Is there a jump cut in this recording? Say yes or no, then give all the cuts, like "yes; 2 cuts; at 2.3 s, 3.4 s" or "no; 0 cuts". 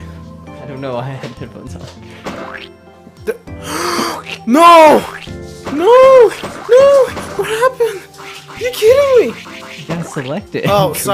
yes; 1 cut; at 2.6 s